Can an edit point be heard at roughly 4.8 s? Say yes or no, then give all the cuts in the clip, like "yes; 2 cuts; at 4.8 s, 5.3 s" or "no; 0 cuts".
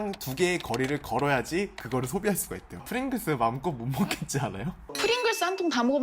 no; 1 cut; at 2.9 s